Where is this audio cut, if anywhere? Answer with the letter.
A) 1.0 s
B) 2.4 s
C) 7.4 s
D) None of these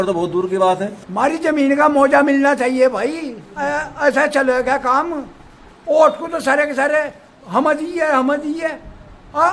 A